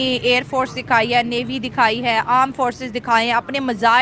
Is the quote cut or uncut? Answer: uncut